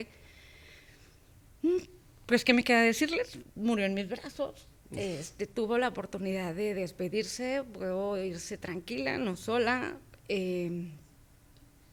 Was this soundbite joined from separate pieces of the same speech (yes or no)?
no